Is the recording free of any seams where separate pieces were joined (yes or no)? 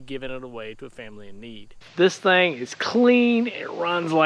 no